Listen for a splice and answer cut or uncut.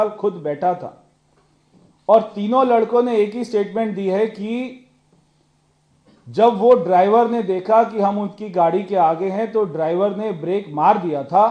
uncut